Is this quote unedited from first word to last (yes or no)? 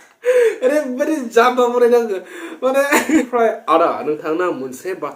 no